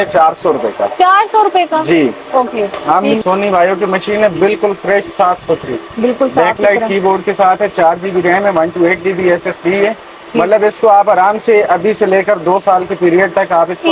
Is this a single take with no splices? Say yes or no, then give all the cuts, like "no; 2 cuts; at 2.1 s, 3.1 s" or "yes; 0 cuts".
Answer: no; 1 cut; at 3.2 s